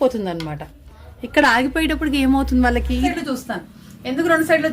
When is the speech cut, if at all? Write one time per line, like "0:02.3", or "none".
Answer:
0:03.1